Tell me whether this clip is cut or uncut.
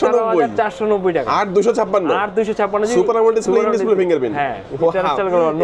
uncut